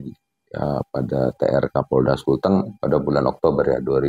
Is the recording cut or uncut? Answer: cut